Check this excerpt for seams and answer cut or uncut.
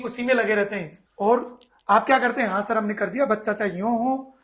cut